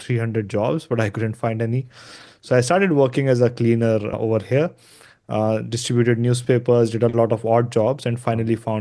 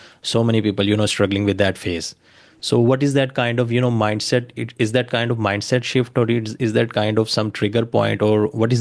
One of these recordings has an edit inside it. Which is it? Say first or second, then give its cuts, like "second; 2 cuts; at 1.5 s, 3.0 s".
first; 1 cut; at 4.1 s